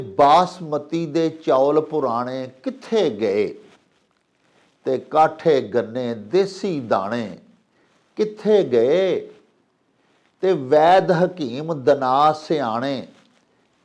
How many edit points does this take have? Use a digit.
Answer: 0